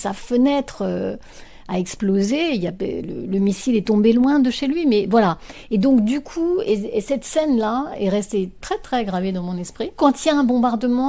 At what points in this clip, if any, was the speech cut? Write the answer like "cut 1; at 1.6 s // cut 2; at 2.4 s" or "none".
cut 1; at 9.9 s